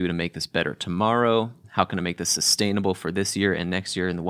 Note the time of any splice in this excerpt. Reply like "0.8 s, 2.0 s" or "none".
1.6 s